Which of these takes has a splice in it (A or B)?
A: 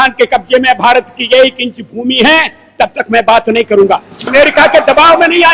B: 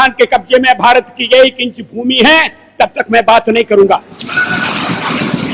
A